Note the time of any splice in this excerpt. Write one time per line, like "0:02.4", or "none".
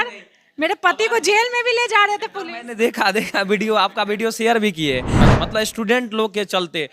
0:05.3